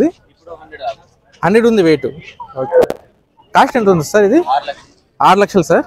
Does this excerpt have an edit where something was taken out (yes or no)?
no